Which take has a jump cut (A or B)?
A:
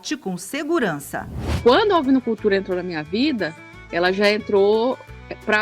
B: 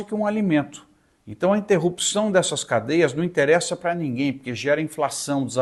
A